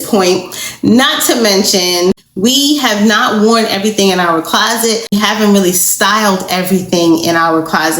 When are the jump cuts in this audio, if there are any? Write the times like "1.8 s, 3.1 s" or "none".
2.3 s, 5.1 s

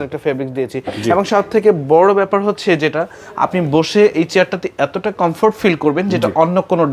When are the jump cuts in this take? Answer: none

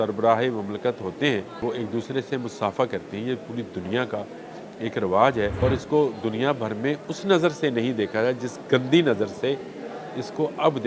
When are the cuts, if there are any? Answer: 1.6 s, 5.5 s

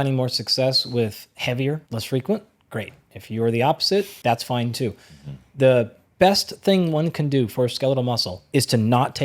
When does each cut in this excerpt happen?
1.9 s, 4.1 s, 8.3 s

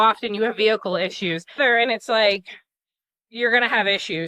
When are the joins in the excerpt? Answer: 1.6 s

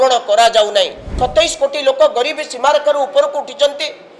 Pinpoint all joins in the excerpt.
1.1 s

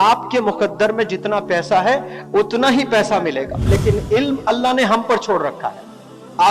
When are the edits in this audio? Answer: 3.7 s

